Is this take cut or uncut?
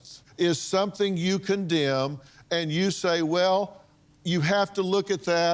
uncut